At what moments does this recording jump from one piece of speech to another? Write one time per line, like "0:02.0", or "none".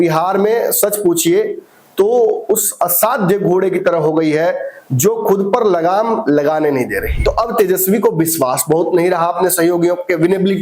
0:07.1